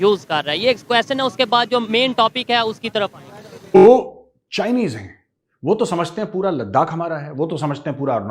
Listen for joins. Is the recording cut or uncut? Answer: cut